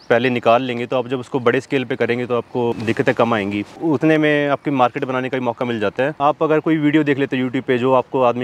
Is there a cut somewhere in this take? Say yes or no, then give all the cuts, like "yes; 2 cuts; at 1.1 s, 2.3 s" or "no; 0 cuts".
yes; 3 cuts; at 2.7 s, 3.7 s, 6.2 s